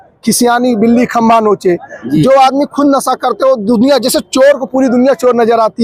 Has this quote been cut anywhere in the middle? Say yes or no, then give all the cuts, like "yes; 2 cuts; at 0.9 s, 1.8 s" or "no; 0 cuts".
no; 0 cuts